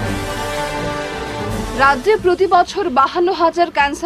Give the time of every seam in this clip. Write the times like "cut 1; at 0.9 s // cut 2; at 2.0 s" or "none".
cut 1; at 1.3 s